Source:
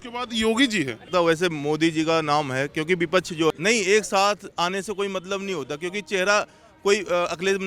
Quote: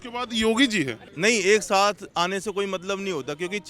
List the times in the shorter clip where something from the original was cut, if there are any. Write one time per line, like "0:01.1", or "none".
0:01.1